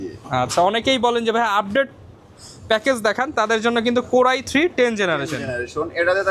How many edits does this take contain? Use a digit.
0